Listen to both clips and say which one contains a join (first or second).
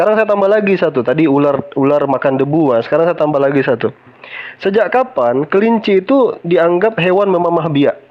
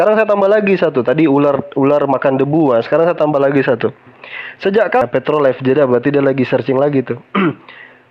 second